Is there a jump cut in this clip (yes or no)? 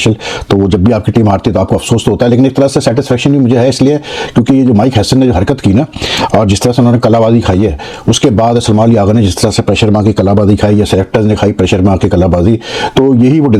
no